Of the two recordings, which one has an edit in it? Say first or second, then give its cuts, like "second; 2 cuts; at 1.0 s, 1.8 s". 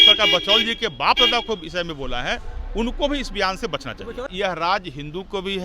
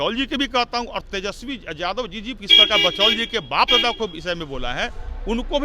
first; 1 cut; at 4.3 s